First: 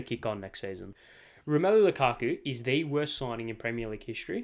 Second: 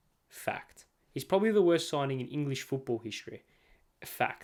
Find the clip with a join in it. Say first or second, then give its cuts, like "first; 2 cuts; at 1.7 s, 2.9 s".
first; 1 cut; at 0.9 s